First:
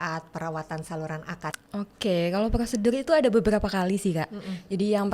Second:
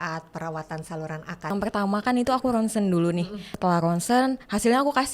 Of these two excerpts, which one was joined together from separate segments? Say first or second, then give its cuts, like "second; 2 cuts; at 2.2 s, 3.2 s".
second; 2 cuts; at 1.5 s, 3.4 s